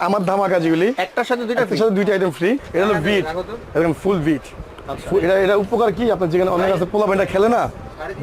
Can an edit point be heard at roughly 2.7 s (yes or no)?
yes